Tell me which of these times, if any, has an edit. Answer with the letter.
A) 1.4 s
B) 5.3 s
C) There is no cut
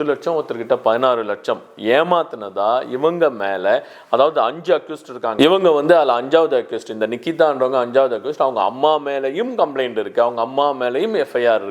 C